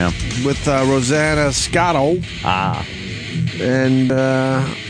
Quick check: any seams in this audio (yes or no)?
no